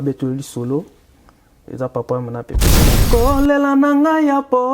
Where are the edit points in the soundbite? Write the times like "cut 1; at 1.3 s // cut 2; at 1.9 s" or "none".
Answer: cut 1; at 2.9 s